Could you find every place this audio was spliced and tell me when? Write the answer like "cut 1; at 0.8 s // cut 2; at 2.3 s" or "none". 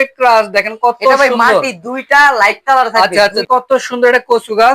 cut 1; at 3.4 s